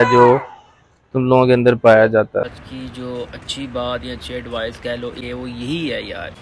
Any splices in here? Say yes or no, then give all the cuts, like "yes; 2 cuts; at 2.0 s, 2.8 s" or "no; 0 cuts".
yes; 2 cuts; at 2.5 s, 5.2 s